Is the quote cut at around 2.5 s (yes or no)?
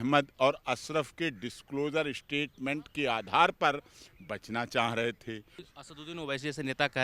no